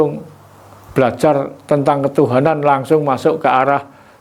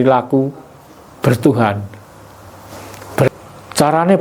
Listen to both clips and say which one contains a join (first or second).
second